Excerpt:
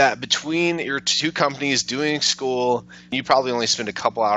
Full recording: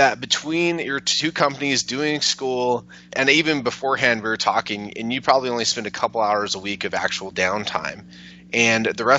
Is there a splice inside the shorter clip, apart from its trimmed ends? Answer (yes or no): yes